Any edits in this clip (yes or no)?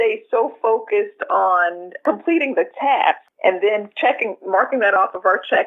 yes